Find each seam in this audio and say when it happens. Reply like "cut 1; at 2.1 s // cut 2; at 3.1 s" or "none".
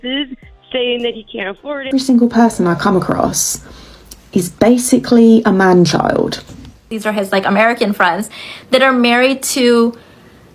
cut 1; at 1.9 s // cut 2; at 7.0 s

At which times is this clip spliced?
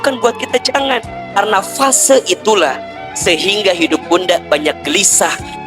cut 1; at 1.4 s // cut 2; at 3.0 s

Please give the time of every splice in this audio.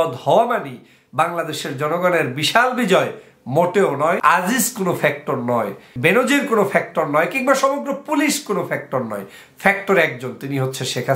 cut 1; at 4.2 s // cut 2; at 5.9 s

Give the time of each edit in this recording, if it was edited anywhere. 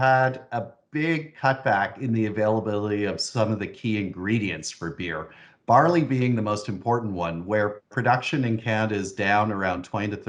none

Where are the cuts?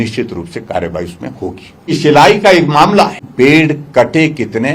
cut 1; at 2.0 s // cut 2; at 3.3 s

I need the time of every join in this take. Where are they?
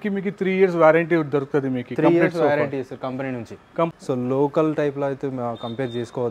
cut 1; at 3.9 s

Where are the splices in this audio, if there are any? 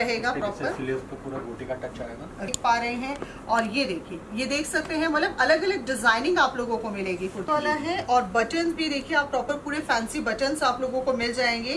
cut 1; at 2.4 s // cut 2; at 7.5 s

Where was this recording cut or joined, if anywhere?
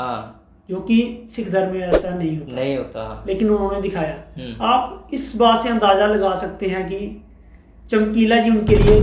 none

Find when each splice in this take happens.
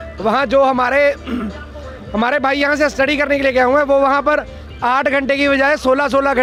none

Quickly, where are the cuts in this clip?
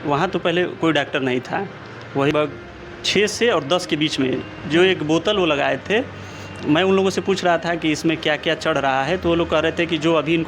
cut 1; at 2.3 s

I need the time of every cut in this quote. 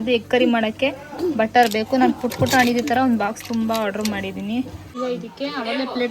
cut 1; at 4.8 s

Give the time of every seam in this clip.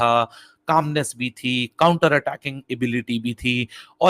none

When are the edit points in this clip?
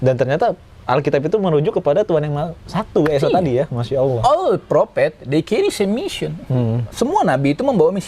none

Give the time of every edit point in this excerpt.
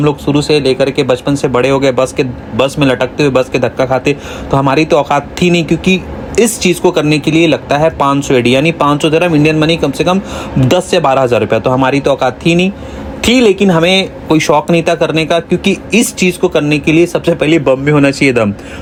none

